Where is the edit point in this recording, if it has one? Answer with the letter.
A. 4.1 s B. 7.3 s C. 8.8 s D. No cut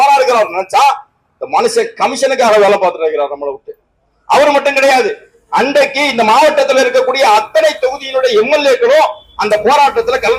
D